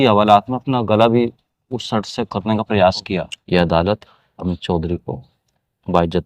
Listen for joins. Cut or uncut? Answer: cut